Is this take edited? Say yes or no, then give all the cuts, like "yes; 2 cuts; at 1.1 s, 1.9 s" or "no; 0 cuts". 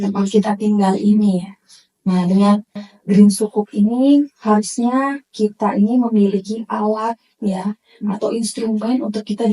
no; 0 cuts